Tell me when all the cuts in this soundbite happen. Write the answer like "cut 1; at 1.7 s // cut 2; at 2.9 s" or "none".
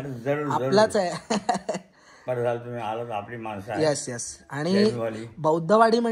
none